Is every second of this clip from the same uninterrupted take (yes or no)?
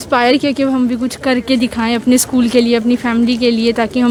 yes